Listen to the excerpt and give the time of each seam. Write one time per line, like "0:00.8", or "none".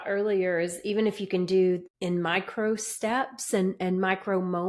0:01.9